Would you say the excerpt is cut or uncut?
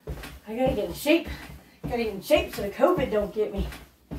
uncut